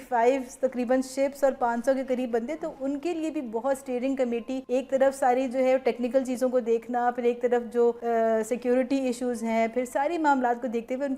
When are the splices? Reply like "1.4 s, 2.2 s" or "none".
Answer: 4.6 s, 8.0 s

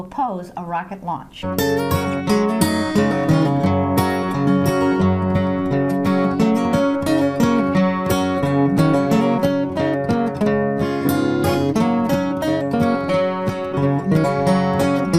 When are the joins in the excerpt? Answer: 1.3 s

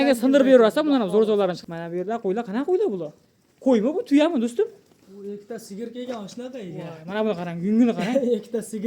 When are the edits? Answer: 1.6 s

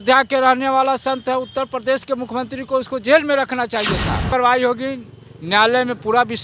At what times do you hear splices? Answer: 4.3 s

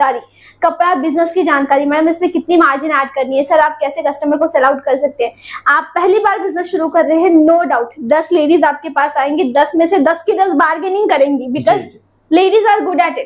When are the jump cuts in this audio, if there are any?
none

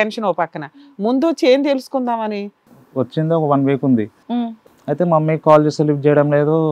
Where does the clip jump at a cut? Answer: 2.6 s, 4.4 s

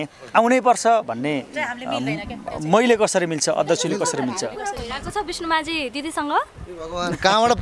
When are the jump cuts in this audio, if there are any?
none

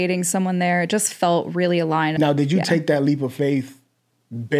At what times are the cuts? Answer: 2.1 s

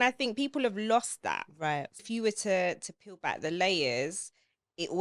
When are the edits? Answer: 2.0 s

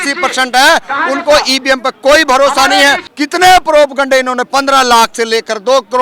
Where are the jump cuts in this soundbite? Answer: 3.1 s

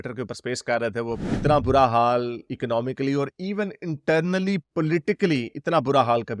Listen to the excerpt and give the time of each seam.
1.3 s

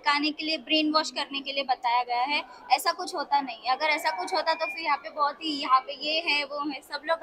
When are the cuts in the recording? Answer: none

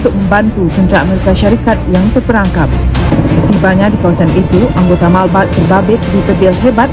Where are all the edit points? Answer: none

